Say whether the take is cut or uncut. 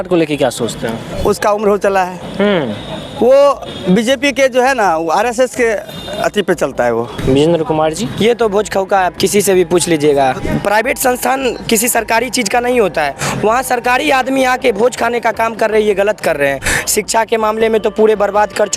cut